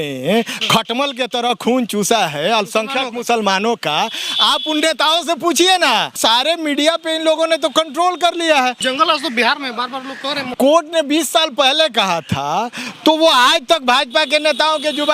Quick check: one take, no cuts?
no; 3 cuts; at 6.2 s, 8.8 s, 10.5 s

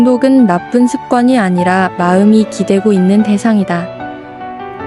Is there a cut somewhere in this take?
yes; 1 cut; at 3.9 s

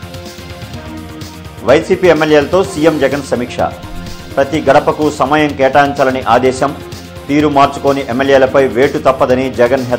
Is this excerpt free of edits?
no; 1 cut; at 1.6 s

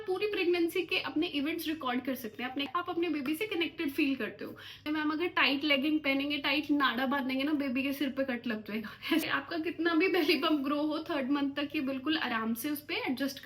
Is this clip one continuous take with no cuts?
no; 3 cuts; at 2.7 s, 4.8 s, 9.2 s

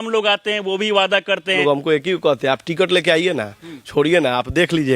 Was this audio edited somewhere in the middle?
yes; 1 cut; at 1.6 s

